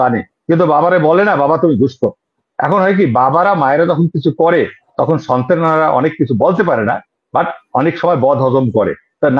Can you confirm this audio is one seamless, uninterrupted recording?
yes; 0 cuts

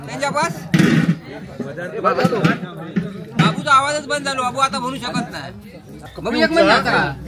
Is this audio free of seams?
yes; 0 cuts

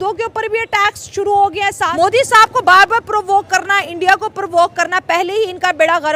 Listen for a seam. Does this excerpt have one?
yes; 1 cut; at 1.9 s

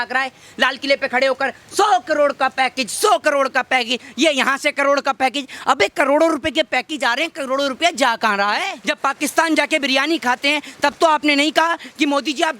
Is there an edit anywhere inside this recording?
yes; 1 cut; at 8.8 s

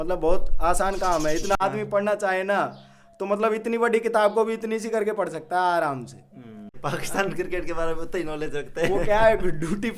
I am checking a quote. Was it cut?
yes; 2 cuts; at 1.6 s, 6.7 s

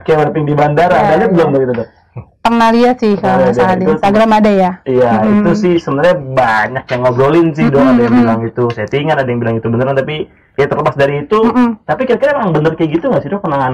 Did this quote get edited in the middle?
no; 0 cuts

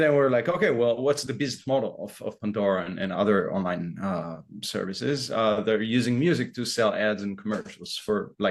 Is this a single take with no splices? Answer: yes; 0 cuts

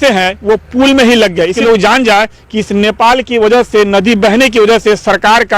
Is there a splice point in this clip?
yes; 1 cut; at 1.6 s

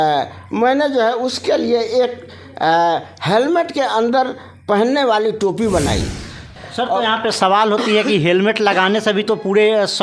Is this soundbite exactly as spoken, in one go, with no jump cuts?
no; 1 cut; at 6.5 s

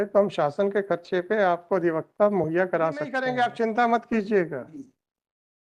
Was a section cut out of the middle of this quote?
yes; 1 cut; at 3.2 s

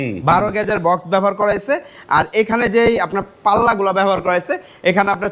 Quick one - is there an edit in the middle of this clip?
no; 0 cuts

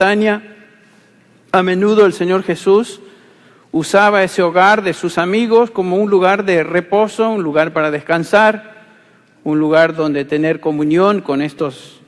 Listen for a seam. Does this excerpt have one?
yes; 1 cut; at 2.9 s

